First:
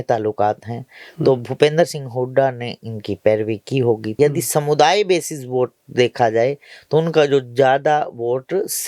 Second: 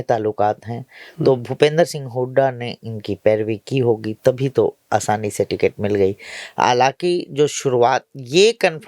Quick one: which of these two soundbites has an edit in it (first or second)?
first